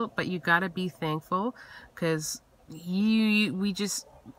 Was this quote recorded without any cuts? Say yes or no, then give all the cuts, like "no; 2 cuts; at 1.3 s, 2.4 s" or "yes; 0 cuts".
yes; 0 cuts